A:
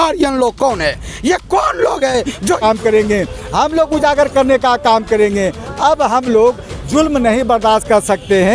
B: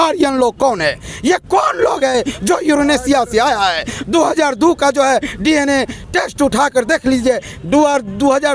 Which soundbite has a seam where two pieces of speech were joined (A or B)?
A